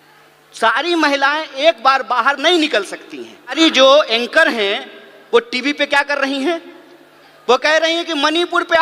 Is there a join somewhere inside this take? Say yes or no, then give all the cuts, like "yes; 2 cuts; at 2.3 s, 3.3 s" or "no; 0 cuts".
yes; 1 cut; at 3.5 s